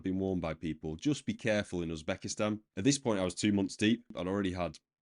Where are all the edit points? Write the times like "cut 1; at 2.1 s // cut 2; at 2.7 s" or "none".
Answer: cut 1; at 2.7 s // cut 2; at 4.1 s